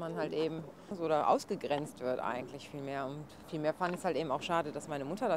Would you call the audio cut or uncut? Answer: cut